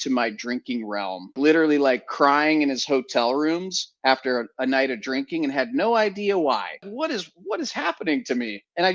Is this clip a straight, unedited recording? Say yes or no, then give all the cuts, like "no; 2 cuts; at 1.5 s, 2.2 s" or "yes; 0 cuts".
no; 2 cuts; at 1.3 s, 6.9 s